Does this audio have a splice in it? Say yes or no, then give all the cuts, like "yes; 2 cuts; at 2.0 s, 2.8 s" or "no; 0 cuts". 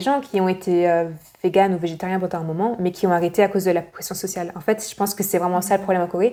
no; 0 cuts